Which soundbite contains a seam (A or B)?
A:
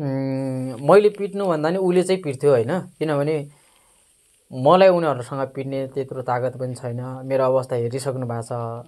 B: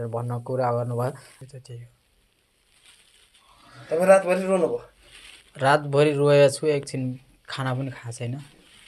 B